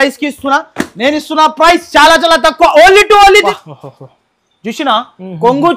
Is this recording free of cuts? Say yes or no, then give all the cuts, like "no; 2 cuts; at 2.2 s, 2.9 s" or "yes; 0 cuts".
no; 1 cut; at 3.4 s